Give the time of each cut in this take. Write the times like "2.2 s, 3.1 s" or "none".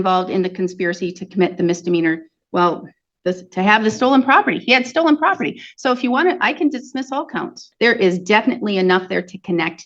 7.6 s